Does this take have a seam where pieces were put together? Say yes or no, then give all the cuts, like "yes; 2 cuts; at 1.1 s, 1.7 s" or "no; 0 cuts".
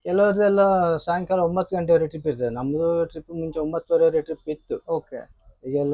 no; 0 cuts